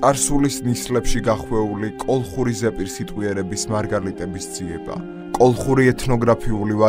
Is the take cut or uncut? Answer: uncut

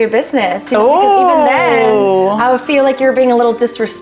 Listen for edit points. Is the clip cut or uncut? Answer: uncut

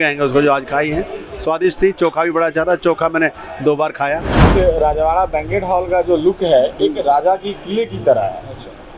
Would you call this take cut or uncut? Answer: cut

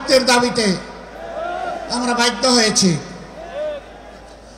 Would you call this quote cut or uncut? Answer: uncut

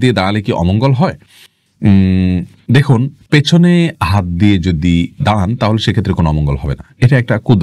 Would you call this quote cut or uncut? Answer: uncut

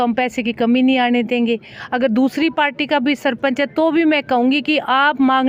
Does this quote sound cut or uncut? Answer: uncut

